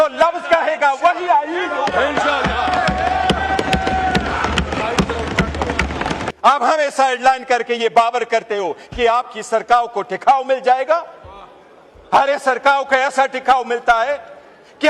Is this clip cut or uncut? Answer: cut